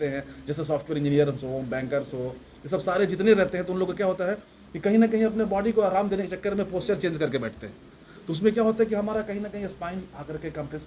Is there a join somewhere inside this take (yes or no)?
no